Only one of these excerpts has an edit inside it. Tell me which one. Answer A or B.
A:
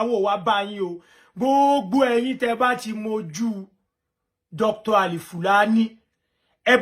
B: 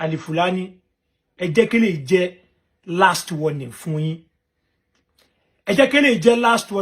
B